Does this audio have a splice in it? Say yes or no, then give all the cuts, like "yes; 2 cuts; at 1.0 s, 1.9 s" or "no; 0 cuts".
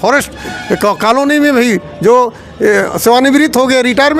no; 0 cuts